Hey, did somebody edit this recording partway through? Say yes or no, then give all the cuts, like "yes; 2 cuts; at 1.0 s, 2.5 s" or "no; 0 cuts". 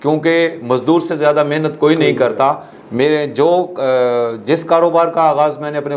yes; 1 cut; at 2.7 s